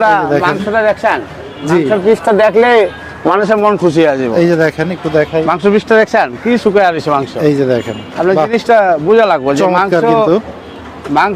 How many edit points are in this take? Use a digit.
0